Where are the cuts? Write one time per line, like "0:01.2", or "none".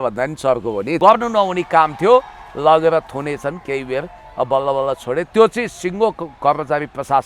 0:01.0